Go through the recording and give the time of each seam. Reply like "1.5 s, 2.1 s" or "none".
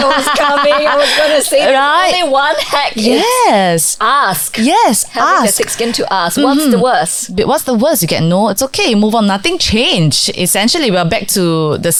none